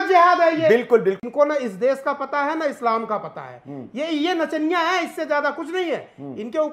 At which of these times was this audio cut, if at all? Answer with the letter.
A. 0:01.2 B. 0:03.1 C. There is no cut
A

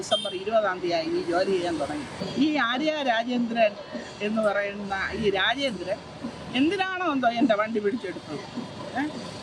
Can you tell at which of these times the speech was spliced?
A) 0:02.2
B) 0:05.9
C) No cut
A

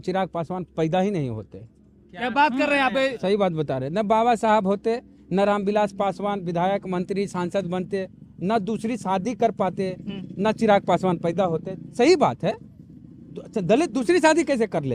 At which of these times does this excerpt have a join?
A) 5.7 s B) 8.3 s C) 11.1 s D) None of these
D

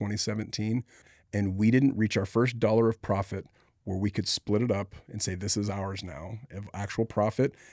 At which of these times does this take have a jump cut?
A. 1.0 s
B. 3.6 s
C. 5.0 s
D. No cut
A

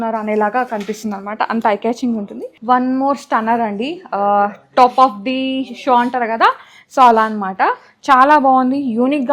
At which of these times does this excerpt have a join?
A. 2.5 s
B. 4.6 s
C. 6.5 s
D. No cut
A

